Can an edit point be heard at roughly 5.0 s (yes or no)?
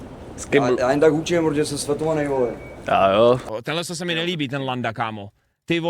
no